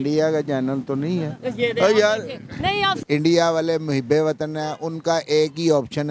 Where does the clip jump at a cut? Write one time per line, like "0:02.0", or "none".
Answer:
0:03.0

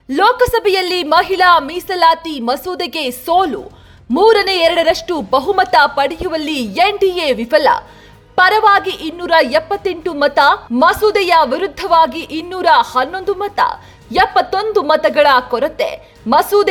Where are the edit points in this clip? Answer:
none

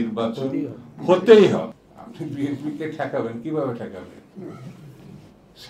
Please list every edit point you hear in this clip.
0:01.7

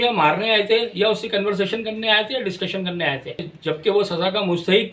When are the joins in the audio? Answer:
0:03.5

